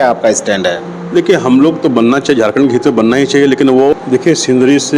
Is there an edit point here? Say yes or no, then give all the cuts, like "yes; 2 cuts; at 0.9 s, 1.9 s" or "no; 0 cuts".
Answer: yes; 1 cut; at 3.9 s